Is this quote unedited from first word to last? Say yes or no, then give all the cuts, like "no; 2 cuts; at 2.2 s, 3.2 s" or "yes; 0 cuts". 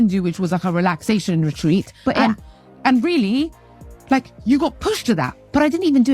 no; 1 cut; at 2.2 s